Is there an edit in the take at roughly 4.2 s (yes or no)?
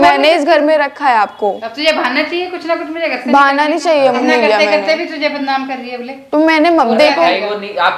yes